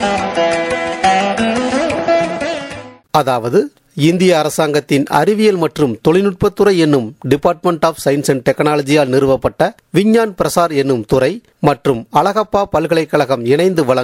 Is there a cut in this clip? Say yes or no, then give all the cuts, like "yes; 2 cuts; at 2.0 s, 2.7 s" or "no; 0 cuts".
yes; 1 cut; at 2.9 s